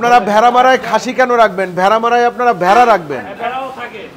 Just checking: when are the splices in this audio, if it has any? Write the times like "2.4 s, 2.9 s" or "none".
none